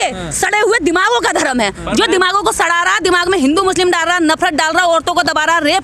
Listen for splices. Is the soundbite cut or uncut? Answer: uncut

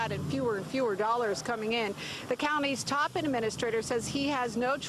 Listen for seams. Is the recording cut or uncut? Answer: uncut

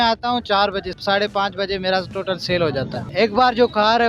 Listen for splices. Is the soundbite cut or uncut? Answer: cut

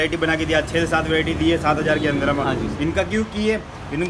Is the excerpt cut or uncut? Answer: uncut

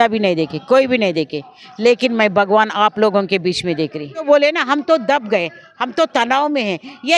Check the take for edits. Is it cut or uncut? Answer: cut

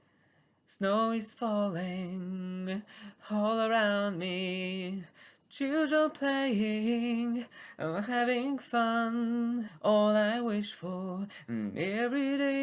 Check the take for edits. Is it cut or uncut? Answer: cut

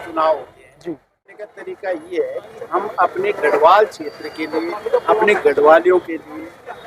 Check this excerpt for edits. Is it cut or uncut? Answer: cut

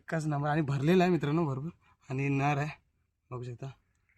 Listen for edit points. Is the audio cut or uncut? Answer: uncut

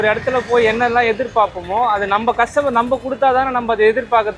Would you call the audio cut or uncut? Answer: uncut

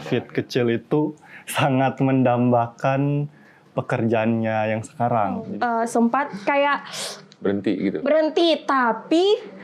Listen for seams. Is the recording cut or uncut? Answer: cut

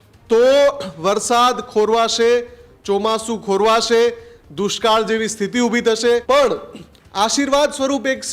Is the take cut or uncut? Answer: cut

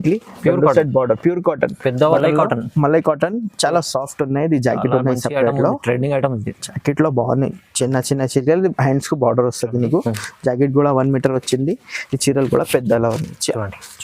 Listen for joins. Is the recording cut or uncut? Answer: cut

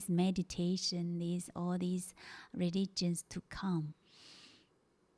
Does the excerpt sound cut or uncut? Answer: uncut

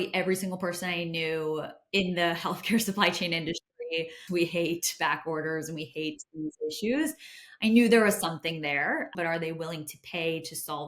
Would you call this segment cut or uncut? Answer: cut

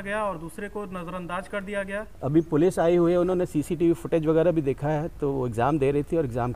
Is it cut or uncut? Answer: cut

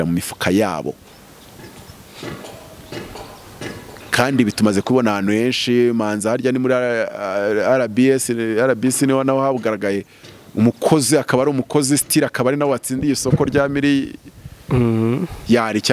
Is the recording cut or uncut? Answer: uncut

